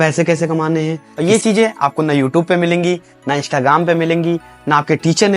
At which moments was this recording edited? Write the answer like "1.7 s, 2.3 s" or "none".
1.0 s